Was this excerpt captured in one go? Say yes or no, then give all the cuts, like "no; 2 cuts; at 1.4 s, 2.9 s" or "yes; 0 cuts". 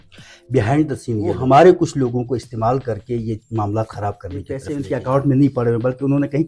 no; 2 cuts; at 1.4 s, 4.7 s